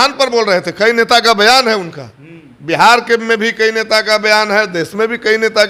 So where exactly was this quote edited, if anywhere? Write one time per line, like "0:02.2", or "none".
none